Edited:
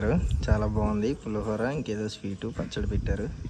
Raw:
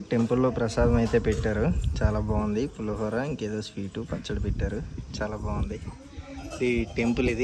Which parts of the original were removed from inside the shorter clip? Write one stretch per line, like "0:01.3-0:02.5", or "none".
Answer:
none